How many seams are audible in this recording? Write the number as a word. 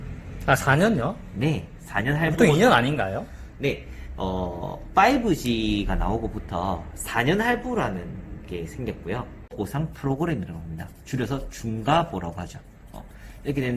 one